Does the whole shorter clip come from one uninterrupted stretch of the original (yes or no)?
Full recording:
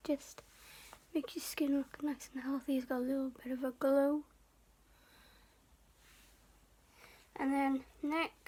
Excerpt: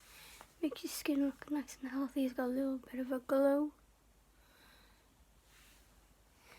yes